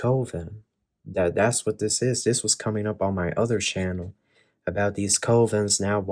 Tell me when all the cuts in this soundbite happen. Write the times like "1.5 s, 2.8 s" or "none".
none